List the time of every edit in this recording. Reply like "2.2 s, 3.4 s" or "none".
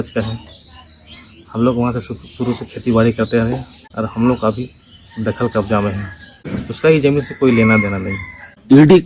none